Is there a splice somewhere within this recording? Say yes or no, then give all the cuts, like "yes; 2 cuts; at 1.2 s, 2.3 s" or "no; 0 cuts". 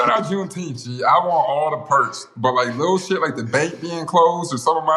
no; 0 cuts